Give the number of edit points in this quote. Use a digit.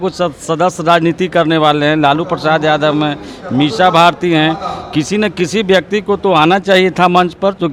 0